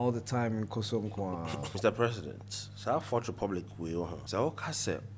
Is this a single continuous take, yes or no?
no